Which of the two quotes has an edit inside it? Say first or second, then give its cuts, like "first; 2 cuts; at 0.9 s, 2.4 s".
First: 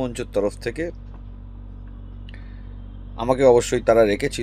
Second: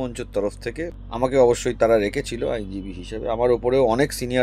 second; 1 cut; at 1.0 s